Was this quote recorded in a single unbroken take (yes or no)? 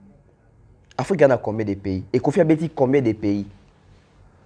yes